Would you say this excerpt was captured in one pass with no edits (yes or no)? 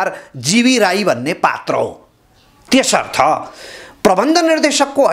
yes